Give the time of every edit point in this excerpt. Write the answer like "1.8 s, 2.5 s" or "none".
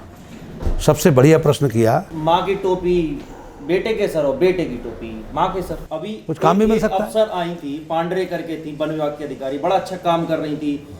2.1 s, 5.8 s